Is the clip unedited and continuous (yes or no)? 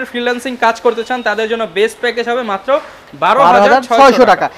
yes